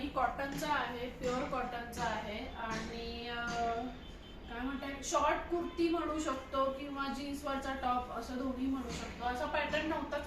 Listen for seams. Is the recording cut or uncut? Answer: uncut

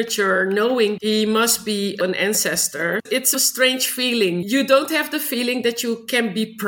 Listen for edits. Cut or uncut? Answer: cut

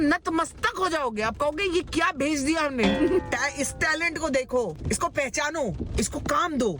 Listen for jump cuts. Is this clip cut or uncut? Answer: cut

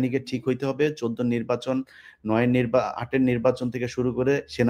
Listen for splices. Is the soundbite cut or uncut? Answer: uncut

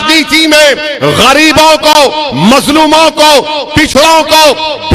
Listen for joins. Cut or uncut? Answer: uncut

